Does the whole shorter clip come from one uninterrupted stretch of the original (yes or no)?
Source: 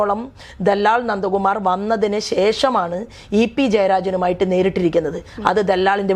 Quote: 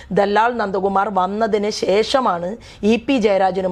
yes